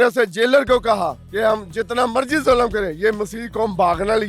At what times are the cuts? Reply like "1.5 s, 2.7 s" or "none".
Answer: 1.2 s

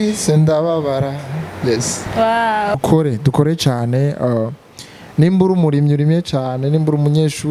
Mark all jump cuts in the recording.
2.7 s

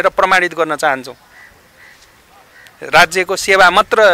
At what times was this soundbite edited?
none

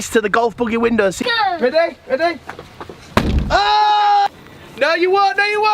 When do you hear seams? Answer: 1.2 s, 4.3 s

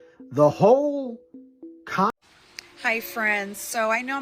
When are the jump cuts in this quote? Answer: 2.1 s

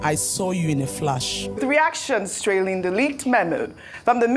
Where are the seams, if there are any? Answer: 1.6 s

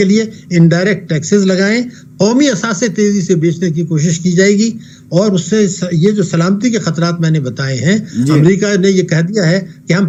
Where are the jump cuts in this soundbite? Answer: none

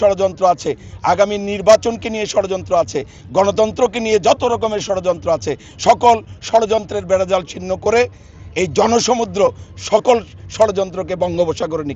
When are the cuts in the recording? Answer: none

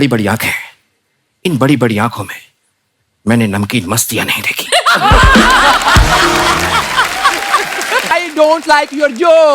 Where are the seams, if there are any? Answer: 8.1 s

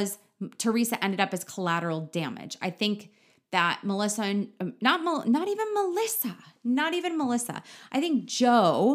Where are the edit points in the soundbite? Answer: none

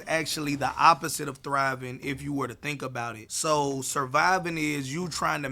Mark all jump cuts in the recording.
none

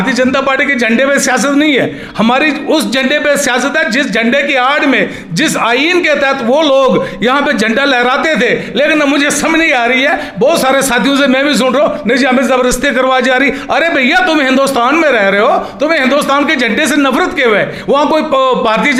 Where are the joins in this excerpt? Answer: none

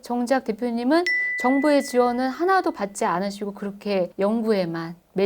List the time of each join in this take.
4.1 s

